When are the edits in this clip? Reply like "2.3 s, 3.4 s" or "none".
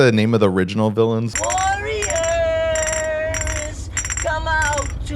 1.3 s